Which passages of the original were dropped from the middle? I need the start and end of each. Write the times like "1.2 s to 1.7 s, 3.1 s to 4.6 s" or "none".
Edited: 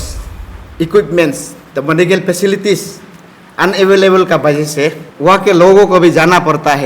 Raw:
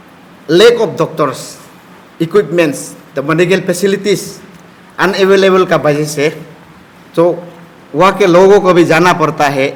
6.5 s to 7.8 s